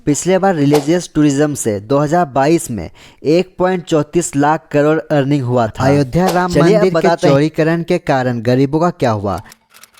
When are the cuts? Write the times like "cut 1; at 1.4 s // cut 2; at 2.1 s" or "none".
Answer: cut 1; at 5.8 s